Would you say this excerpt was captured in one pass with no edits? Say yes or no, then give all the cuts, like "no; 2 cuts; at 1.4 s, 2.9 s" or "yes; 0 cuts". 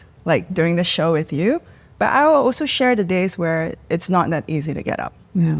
yes; 0 cuts